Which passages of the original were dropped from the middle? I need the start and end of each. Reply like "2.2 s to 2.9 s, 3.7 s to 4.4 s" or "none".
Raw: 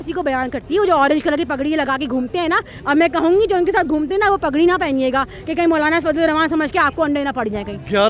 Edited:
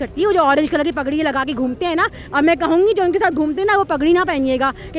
none